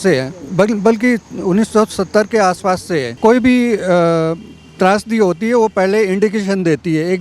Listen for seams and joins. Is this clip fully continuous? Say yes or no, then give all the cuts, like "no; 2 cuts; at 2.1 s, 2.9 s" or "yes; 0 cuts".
no; 1 cut; at 3.2 s